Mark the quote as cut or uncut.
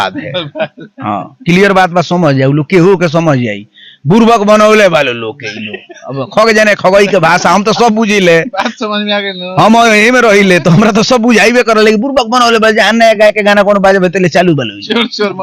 uncut